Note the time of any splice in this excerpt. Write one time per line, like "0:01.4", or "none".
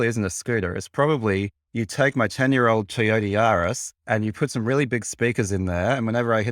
0:01.6
0:03.9